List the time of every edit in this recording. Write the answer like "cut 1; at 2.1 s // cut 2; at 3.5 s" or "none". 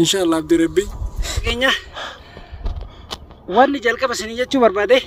cut 1; at 1.4 s